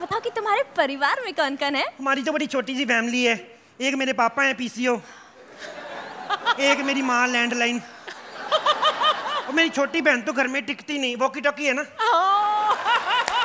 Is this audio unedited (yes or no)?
yes